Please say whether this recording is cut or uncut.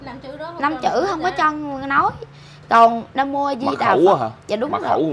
uncut